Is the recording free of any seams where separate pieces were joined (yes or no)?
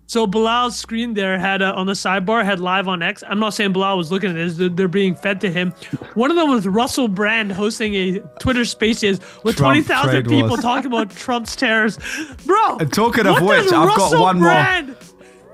yes